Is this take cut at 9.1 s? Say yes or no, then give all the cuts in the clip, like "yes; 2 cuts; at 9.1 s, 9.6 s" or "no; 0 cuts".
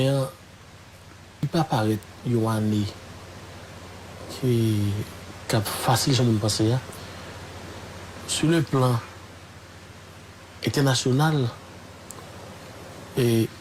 no; 1 cut; at 1.4 s